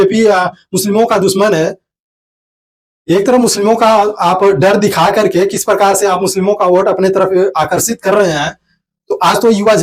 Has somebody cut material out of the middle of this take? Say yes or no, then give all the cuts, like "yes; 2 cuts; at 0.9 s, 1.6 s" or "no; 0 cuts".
no; 0 cuts